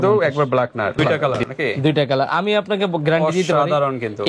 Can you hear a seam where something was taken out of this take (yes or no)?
yes